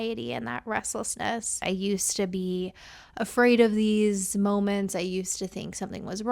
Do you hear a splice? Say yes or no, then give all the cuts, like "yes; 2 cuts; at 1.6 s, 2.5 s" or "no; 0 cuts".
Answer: yes; 1 cut; at 1.6 s